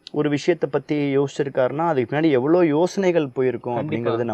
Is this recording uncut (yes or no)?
yes